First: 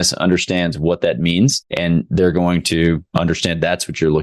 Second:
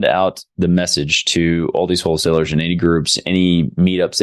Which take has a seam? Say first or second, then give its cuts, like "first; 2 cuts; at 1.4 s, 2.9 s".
first; 2 cuts; at 1.7 s, 3.1 s